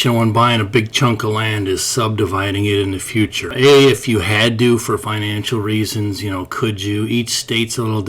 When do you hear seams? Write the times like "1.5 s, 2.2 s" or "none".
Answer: 3.5 s

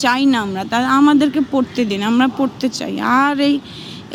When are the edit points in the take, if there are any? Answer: none

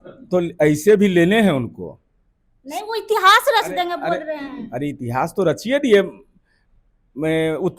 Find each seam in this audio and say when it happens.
none

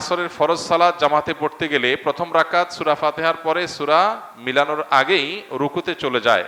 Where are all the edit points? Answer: none

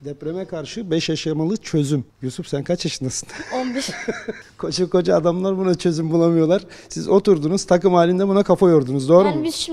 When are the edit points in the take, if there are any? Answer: 2.1 s, 4.5 s

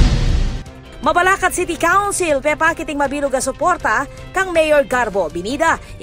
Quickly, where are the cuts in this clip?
0.9 s

